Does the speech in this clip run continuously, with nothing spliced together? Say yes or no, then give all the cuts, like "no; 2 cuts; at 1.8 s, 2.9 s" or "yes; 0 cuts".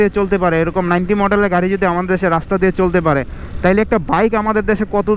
yes; 0 cuts